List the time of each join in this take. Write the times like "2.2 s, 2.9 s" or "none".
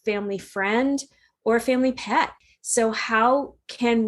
none